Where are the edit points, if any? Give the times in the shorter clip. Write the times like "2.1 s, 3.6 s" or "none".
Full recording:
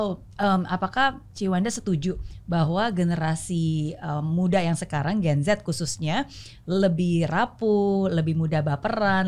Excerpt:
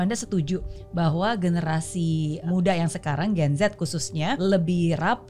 2.4 s, 4.4 s

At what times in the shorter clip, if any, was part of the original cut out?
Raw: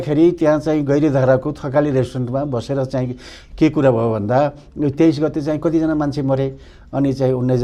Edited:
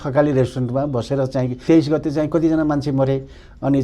1.6 s

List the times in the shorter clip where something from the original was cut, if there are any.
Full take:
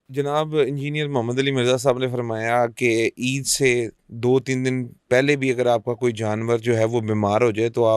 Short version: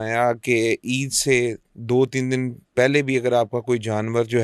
none

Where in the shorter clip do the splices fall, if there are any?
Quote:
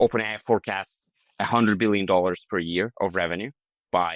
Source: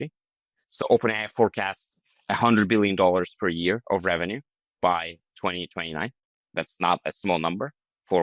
none

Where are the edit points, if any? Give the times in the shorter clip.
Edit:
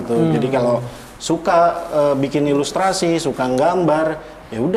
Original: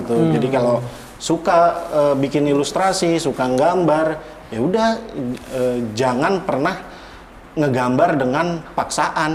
none

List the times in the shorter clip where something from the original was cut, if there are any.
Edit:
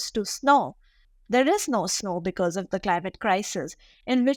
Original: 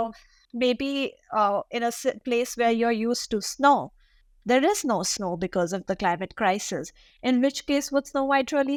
none

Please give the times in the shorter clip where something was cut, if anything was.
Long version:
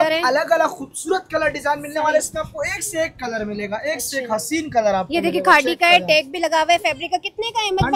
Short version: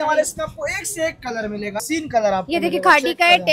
1.8 s

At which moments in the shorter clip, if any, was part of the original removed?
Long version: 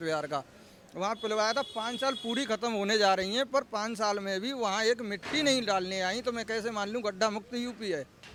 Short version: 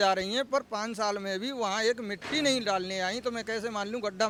none

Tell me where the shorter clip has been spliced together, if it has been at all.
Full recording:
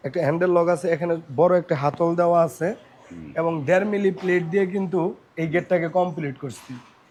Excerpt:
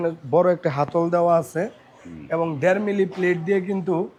none

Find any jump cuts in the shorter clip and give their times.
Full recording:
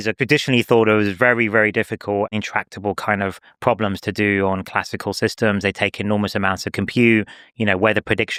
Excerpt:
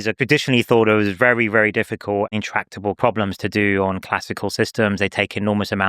3.0 s

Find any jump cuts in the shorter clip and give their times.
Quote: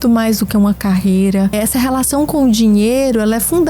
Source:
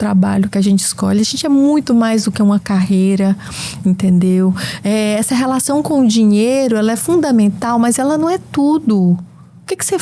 1.5 s

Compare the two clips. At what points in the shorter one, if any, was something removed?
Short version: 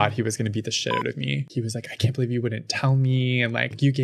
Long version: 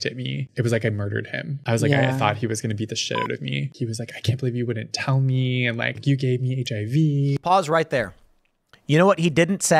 none

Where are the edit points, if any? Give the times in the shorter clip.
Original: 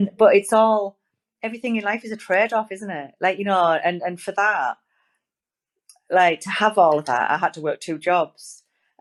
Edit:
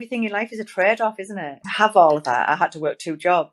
1.6 s

